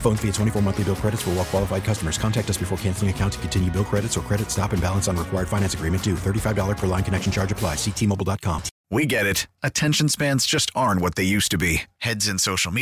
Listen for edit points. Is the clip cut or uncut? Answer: cut